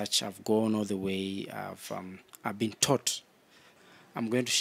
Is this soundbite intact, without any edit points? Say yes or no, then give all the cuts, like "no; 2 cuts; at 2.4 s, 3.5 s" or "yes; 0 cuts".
no; 1 cut; at 3.7 s